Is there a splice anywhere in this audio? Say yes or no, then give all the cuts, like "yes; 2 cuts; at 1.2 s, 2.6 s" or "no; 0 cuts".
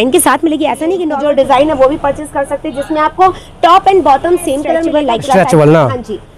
yes; 2 cuts; at 0.9 s, 4.9 s